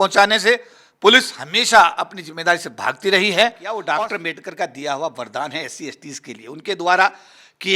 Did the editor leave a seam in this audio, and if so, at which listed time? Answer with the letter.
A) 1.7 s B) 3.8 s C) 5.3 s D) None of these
B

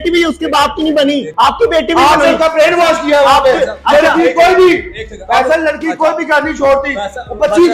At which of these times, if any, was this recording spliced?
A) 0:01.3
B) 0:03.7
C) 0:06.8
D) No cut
A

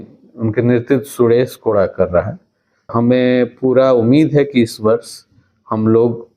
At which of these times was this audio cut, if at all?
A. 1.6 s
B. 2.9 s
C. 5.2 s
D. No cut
B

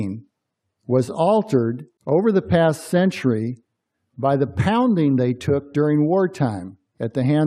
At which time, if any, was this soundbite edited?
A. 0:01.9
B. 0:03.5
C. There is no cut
A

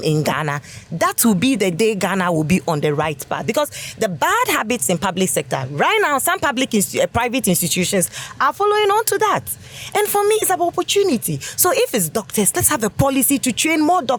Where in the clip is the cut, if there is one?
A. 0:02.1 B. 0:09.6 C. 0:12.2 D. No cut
D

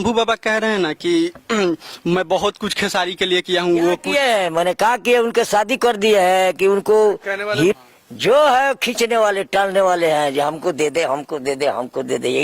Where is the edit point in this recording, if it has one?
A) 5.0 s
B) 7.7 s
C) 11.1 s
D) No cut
B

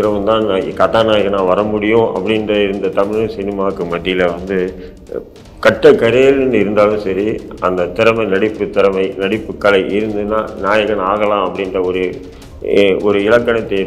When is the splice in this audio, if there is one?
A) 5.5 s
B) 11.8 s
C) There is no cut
C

